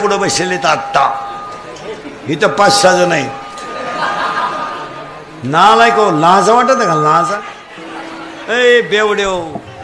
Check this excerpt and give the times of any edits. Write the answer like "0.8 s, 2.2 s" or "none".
none

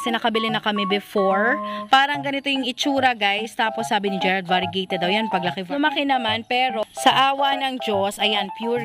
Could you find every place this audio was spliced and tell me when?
5.6 s

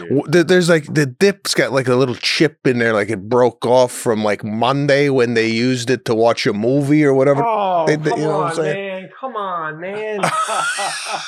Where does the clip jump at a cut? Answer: none

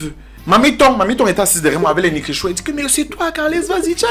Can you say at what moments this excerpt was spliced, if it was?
none

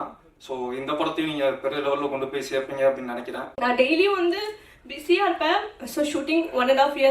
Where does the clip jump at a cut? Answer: 3.4 s

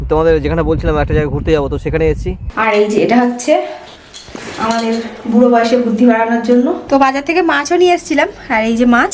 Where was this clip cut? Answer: 2.4 s, 6.8 s

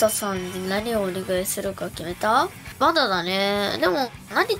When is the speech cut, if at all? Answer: 2.6 s

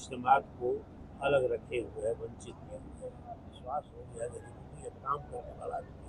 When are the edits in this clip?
3.5 s

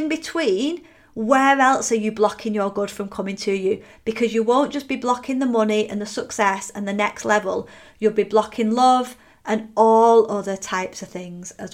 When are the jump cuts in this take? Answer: none

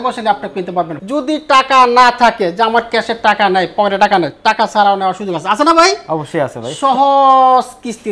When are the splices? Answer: 1.0 s

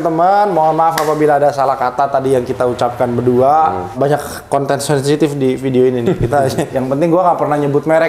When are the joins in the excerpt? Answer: 3.9 s, 6.7 s

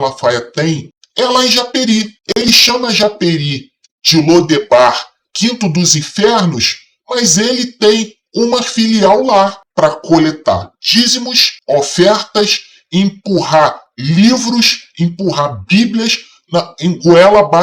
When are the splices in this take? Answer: none

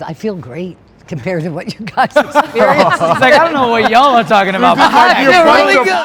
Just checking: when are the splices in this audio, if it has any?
none

